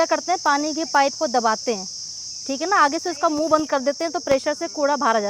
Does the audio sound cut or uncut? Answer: uncut